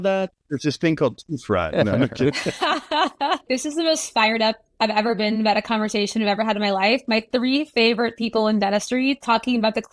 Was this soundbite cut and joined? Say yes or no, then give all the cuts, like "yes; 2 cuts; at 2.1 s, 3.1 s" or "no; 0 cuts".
yes; 1 cut; at 2.6 s